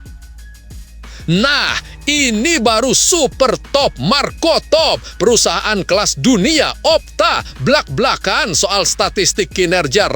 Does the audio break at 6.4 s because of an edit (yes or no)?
no